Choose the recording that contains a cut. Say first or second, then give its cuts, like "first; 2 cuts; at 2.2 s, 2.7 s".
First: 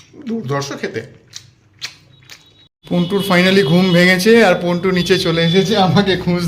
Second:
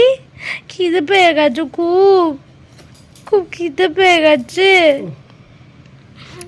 first; 1 cut; at 2.7 s